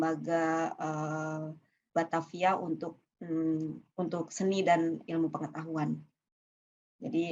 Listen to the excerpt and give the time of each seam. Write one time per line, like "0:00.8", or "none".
none